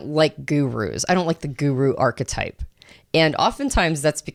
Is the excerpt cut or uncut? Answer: uncut